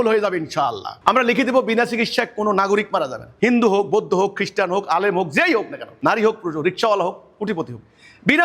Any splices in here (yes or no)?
yes